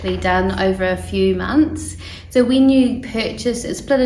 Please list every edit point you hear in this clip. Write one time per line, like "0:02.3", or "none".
none